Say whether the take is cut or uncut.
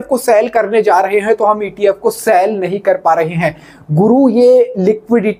uncut